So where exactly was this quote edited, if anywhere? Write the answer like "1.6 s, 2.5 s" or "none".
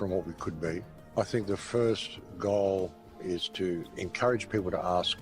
0.9 s, 3.4 s